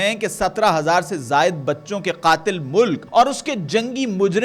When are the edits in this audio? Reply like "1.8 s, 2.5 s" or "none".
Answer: 3.0 s